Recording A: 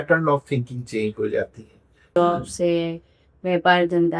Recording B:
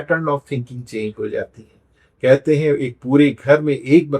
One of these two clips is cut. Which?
A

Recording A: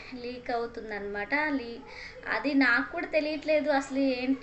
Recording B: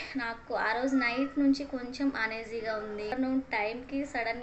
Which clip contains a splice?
B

